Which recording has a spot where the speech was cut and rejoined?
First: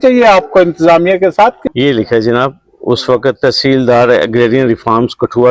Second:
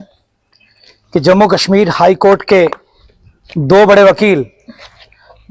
first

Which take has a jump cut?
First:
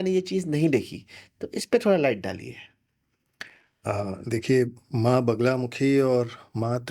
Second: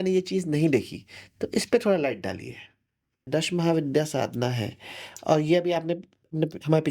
second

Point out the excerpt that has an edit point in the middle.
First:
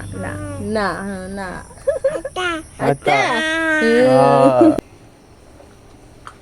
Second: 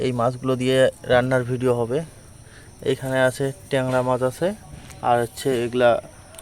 first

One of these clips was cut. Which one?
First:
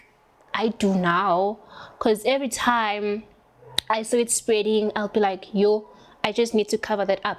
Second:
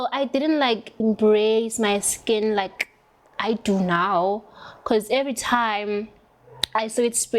second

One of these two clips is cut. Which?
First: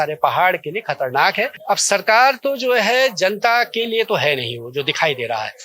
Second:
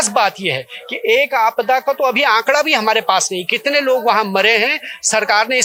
first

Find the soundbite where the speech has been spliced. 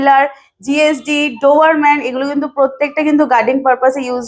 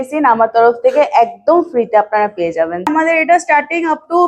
second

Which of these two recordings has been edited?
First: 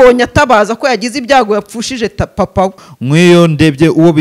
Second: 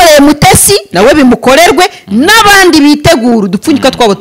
first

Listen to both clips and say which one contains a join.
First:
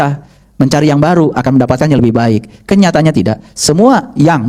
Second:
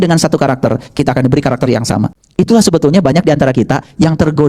second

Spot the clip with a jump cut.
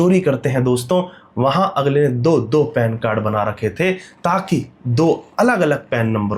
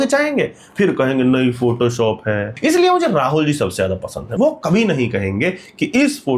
second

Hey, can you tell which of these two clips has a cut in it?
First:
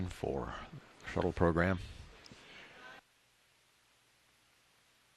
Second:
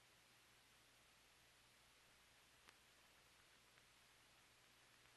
first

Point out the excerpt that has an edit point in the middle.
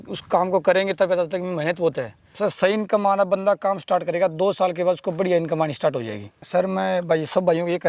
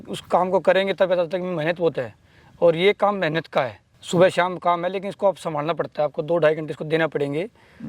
first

